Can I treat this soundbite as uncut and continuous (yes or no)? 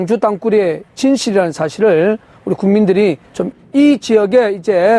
yes